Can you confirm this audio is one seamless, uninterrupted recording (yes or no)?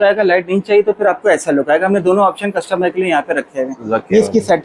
yes